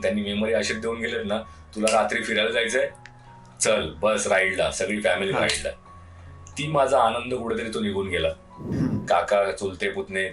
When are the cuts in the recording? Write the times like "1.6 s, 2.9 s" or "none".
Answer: 8.6 s